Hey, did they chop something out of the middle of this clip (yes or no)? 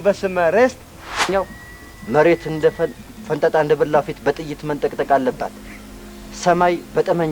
yes